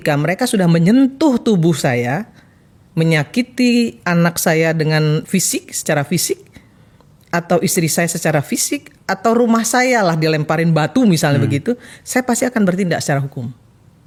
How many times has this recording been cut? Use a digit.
0